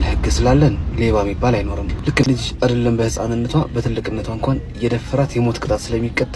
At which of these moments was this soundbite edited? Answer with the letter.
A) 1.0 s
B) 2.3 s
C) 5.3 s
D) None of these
B